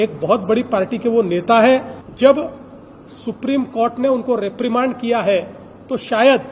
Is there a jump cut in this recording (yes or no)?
yes